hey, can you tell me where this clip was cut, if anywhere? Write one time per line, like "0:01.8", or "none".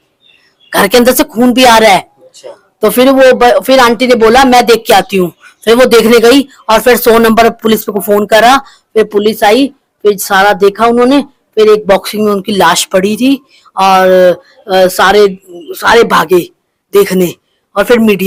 none